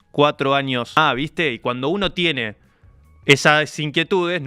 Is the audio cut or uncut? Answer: cut